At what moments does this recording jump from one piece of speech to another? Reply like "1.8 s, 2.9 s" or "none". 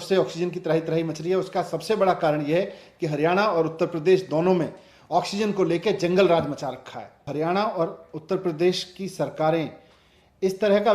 7.3 s